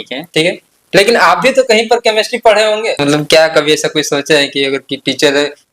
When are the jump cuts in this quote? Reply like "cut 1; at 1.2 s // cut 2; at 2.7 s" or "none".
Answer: cut 1; at 3.0 s